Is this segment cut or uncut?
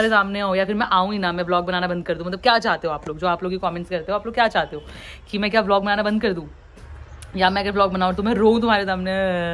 uncut